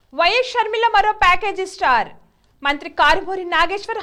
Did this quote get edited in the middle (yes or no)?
no